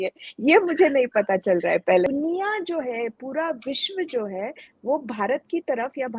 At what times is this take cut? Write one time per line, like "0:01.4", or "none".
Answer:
0:02.1